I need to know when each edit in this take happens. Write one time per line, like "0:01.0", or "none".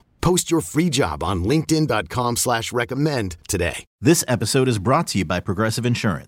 0:03.8

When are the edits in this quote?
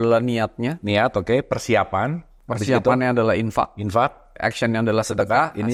none

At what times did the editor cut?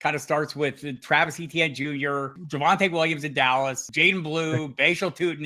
0:02.4
0:03.9

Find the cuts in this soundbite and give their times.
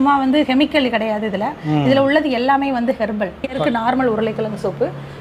0:03.6

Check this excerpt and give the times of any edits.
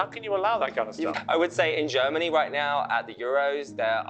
0:01.2

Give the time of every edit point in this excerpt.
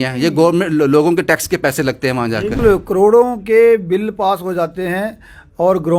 0:02.6

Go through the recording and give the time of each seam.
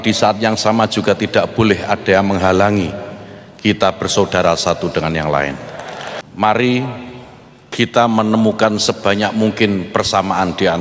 0:06.1

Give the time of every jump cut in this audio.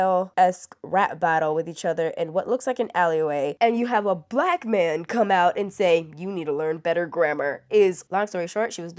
0:03.5
0:08.0

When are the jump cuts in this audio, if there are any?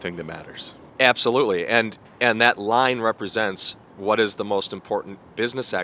none

